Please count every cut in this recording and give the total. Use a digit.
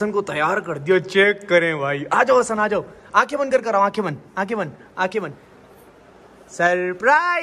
0